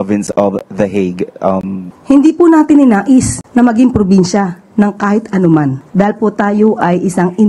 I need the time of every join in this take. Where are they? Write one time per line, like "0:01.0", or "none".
0:01.9

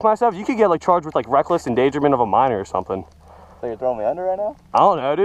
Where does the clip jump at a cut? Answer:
none

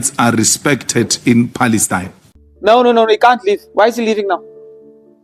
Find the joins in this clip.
0:02.5

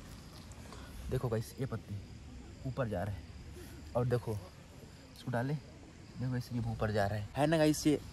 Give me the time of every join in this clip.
0:07.2

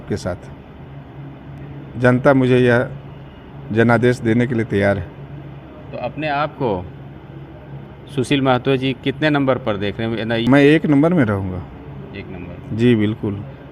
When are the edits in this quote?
0:01.6
0:10.4

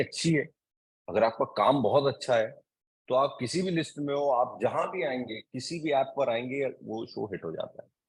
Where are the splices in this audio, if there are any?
none

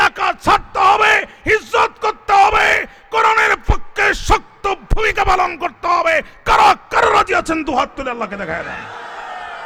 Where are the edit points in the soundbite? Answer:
none

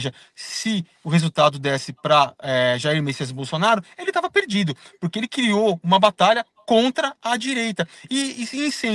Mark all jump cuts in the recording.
none

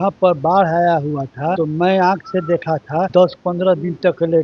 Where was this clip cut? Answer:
0:01.6
0:03.1

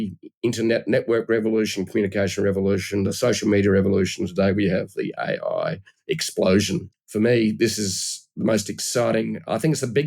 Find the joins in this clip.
0:06.9

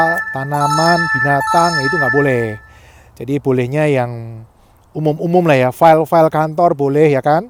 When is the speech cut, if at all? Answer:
none

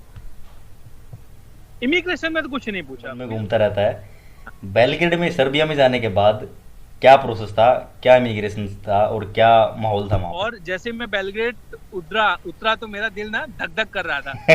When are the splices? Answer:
0:03.2
0:10.6

